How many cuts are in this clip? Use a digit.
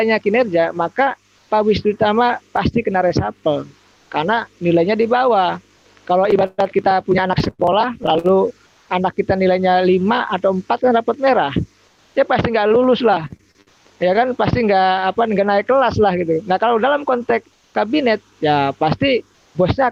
0